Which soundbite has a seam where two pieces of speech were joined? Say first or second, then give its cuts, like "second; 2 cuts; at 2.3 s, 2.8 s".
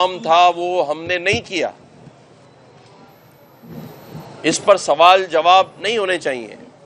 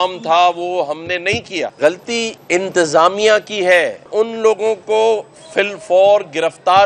second; 3 cuts; at 1.7 s, 2.4 s, 4.1 s